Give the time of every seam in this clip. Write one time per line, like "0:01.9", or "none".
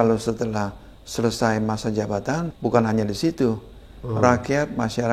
0:02.5

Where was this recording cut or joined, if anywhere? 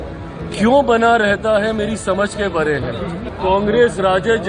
0:03.2

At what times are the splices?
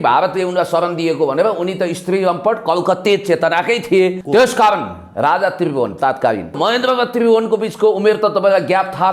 0:04.2
0:06.6

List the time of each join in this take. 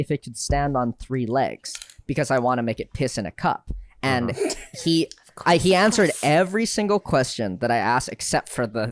none

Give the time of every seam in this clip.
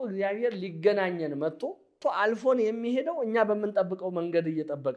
0:02.0

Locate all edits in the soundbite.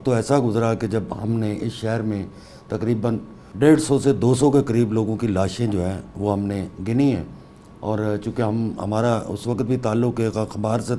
0:03.4

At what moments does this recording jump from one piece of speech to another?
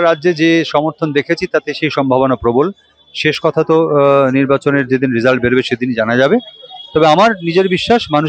none

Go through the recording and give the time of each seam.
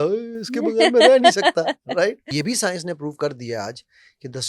0:02.3

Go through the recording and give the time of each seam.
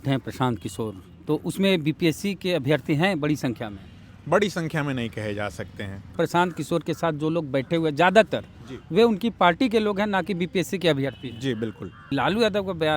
0:06.1
0:12.0

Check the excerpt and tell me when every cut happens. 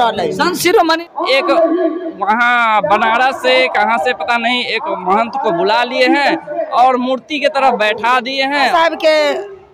0:01.0
0:08.7

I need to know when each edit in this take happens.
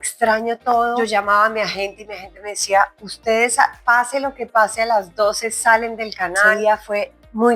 0:01.0
0:06.6

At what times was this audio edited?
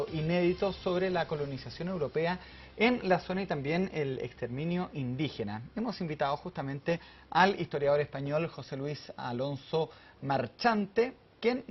0:02.1

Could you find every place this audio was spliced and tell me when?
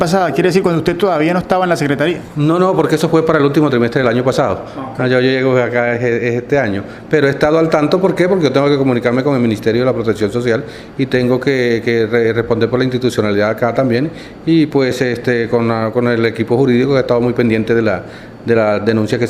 none

